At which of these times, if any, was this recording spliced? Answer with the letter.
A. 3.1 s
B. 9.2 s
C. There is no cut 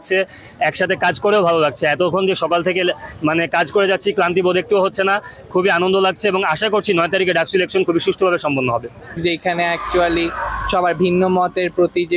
B